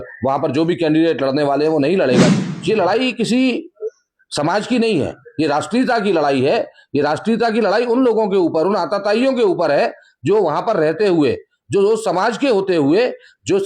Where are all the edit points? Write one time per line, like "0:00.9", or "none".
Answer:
0:02.3